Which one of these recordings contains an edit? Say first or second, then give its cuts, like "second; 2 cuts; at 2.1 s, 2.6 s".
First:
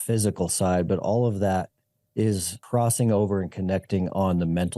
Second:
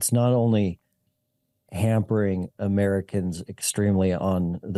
first; 1 cut; at 2.5 s